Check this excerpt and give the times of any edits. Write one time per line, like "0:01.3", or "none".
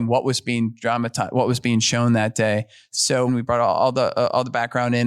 0:03.3